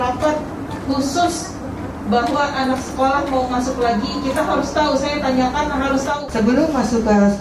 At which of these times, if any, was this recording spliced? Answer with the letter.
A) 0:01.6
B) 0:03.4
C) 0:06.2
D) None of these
C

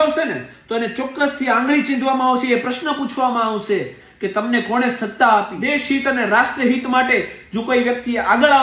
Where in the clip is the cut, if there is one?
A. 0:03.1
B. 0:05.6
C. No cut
B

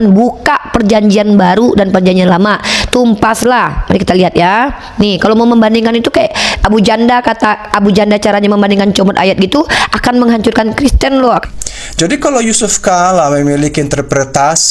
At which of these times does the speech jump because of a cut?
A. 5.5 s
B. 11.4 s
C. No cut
B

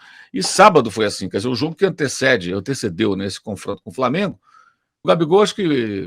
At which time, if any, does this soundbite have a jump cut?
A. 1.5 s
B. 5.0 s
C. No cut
B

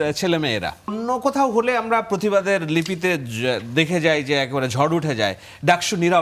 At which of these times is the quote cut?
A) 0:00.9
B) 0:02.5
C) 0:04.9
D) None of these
A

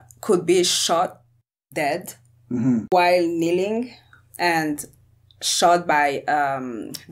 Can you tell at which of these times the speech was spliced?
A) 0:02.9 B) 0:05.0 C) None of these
A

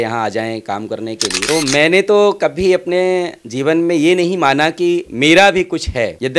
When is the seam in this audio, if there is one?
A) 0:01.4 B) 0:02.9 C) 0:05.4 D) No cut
A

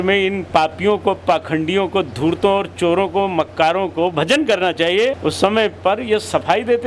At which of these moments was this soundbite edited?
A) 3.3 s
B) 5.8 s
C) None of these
C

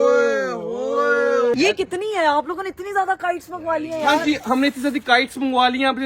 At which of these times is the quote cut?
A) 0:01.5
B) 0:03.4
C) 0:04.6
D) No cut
A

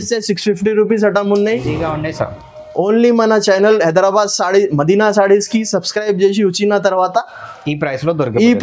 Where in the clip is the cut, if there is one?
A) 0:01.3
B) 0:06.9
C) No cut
C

